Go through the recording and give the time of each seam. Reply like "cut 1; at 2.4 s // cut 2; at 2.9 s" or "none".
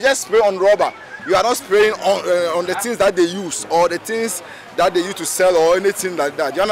none